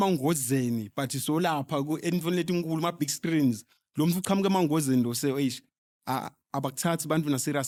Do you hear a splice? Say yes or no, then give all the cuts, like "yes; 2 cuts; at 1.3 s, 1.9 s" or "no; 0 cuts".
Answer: no; 0 cuts